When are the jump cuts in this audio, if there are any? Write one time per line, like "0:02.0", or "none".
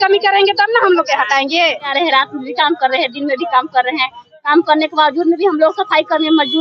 0:01.9